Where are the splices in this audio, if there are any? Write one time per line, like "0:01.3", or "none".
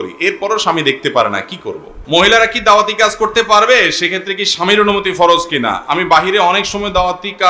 0:01.9